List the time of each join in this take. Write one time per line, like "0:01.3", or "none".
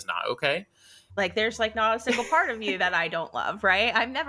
0:01.1